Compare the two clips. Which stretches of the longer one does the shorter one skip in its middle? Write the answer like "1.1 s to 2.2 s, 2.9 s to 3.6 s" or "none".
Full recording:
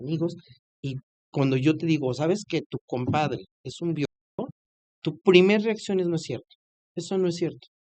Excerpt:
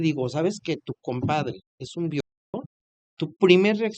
none